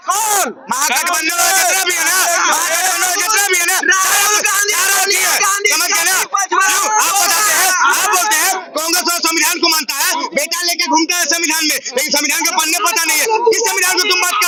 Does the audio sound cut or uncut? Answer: uncut